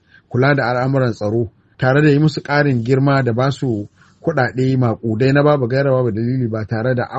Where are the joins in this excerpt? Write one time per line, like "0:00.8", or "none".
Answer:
none